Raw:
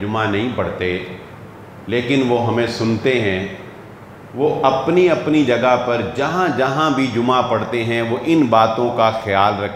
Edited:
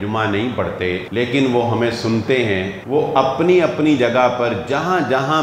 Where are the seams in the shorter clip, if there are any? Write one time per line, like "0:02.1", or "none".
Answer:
0:01.1
0:02.8